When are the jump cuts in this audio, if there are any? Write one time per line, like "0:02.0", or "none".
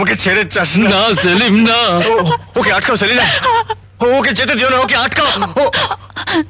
none